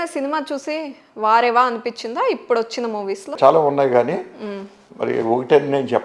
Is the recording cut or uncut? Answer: cut